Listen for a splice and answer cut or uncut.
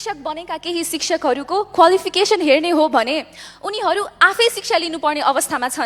uncut